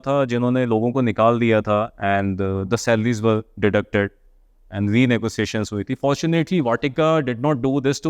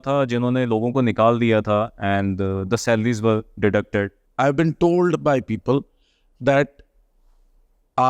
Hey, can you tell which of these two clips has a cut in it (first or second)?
second